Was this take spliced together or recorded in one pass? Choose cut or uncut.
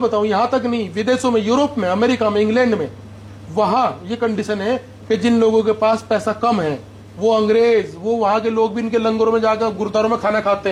uncut